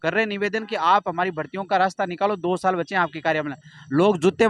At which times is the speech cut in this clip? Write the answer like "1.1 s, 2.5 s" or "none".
none